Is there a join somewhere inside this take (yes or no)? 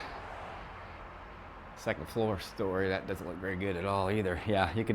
no